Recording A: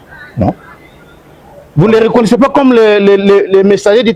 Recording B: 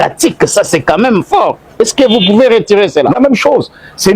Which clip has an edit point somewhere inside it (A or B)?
B